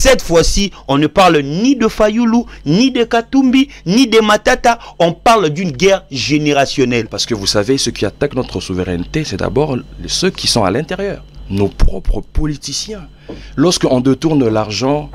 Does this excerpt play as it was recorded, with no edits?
no; 1 cut; at 7.2 s

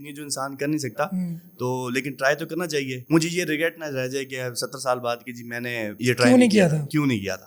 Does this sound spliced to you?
no; 0 cuts

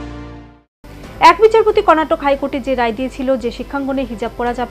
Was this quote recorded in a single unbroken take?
yes; 0 cuts

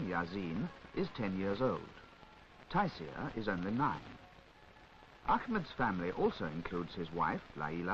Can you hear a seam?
yes; 1 cut; at 1.4 s

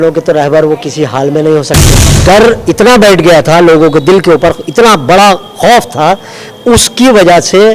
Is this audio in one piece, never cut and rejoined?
no; 1 cut; at 2.1 s

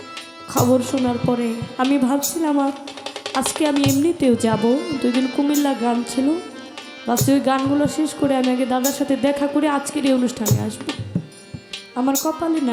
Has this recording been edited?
no; 0 cuts

